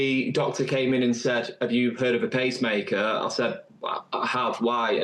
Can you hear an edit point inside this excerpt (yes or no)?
no